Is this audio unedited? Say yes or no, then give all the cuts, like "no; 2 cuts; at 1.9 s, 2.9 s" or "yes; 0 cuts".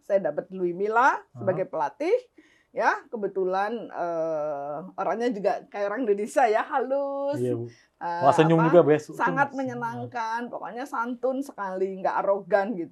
yes; 0 cuts